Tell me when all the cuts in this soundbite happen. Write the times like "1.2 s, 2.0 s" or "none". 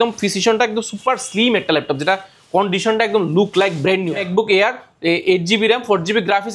4.3 s